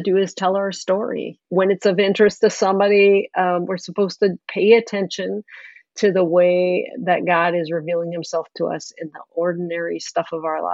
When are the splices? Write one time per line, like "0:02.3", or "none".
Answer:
0:01.3